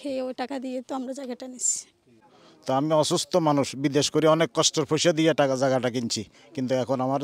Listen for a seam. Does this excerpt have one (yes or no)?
yes